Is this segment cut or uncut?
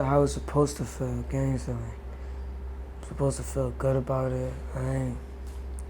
uncut